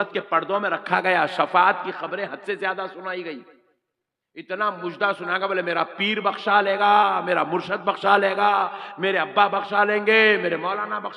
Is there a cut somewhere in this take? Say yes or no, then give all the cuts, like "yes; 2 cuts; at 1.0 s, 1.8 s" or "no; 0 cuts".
no; 0 cuts